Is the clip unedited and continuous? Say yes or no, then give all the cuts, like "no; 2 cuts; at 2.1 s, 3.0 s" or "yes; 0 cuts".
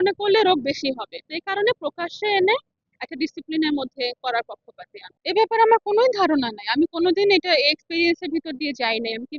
yes; 0 cuts